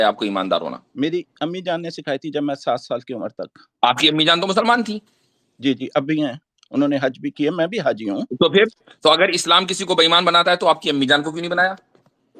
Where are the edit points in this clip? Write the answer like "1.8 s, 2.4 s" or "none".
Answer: none